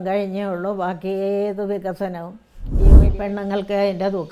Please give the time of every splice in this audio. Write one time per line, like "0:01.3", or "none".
0:02.9